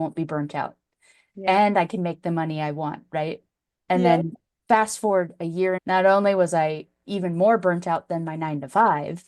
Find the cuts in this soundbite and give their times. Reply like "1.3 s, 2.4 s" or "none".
5.8 s